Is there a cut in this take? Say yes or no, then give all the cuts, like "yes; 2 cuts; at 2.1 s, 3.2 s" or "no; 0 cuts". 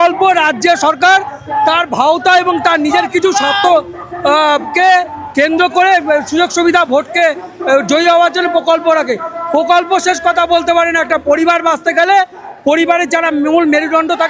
no; 0 cuts